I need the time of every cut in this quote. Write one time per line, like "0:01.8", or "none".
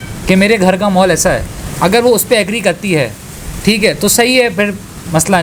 none